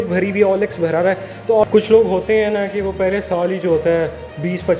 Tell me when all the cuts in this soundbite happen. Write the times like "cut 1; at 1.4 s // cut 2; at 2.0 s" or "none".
cut 1; at 1.7 s